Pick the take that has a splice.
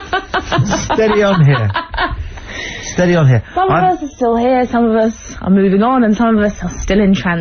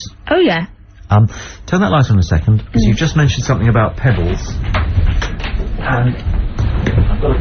first; 1 cut; at 2.8 s

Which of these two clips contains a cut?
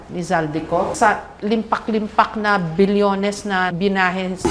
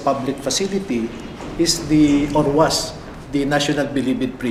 first; 1 cut; at 0.9 s

